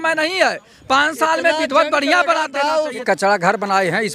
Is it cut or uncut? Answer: cut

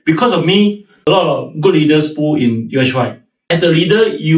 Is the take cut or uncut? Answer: cut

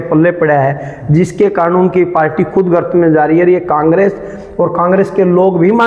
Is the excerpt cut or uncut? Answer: uncut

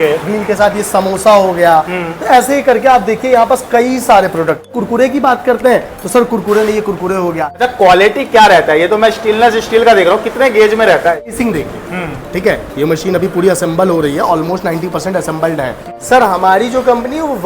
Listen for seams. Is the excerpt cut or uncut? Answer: cut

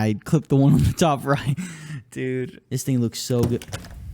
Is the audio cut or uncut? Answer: cut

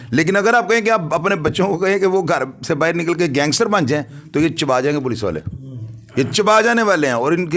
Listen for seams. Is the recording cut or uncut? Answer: uncut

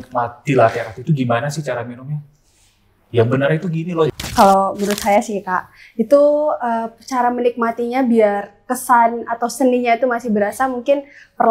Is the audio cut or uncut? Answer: cut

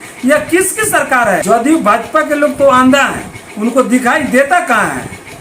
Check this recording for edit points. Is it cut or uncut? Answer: cut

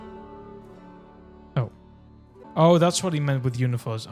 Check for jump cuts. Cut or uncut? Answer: cut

